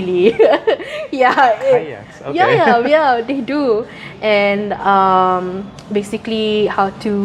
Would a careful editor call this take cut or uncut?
uncut